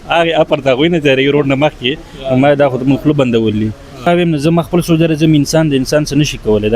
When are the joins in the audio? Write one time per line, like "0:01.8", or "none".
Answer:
0:04.1